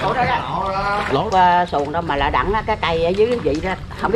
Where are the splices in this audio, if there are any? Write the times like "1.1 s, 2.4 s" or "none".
1.2 s